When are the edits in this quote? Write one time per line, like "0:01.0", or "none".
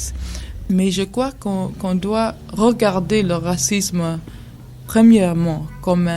0:04.7